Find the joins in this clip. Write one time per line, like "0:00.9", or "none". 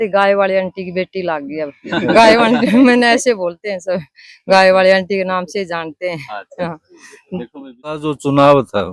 0:08.0